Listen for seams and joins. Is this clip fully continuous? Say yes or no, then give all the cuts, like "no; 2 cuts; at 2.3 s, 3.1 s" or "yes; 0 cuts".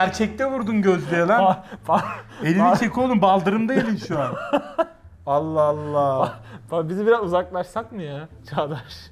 yes; 0 cuts